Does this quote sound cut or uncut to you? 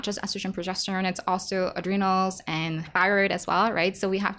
cut